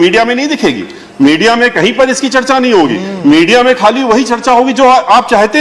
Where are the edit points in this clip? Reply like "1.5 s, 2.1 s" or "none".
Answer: none

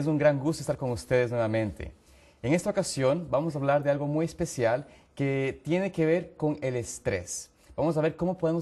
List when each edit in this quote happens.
3.5 s

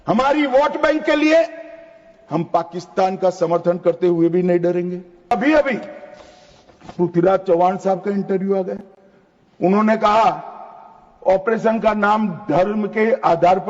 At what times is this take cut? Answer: 5.3 s

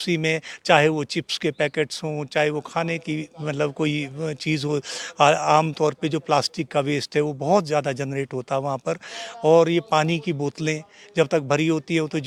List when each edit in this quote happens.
none

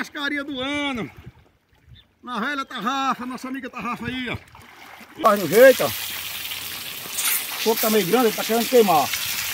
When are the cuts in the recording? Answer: 5.3 s

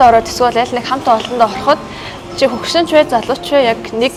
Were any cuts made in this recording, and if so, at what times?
none

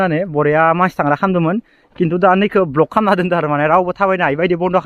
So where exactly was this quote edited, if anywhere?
none

